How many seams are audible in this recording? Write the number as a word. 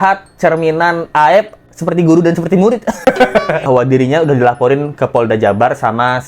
one